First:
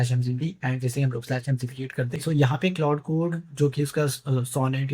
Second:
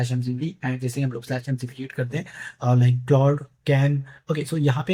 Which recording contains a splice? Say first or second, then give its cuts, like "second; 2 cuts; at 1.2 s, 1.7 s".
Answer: first; 1 cut; at 2.2 s